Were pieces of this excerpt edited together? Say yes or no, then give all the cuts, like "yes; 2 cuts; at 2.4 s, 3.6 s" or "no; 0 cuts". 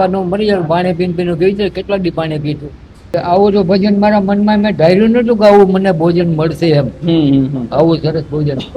yes; 1 cut; at 3.1 s